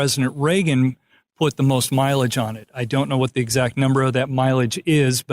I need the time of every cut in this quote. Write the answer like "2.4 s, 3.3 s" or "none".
4.3 s